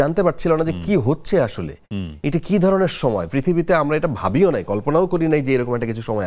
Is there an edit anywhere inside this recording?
no; 0 cuts

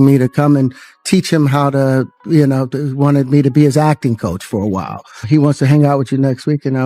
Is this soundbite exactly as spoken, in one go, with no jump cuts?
no; 1 cut; at 5.2 s

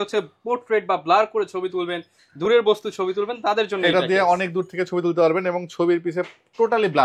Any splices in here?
no; 0 cuts

